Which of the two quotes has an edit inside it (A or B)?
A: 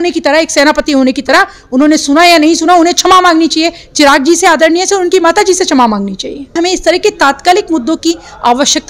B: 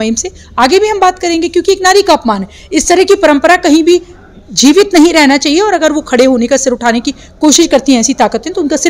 A